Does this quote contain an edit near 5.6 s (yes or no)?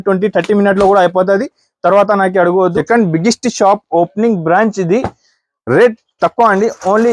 no